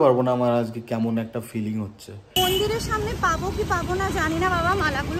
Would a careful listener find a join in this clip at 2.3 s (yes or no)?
yes